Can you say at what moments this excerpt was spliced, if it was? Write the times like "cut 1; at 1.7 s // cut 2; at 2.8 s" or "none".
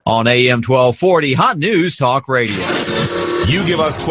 cut 1; at 2.4 s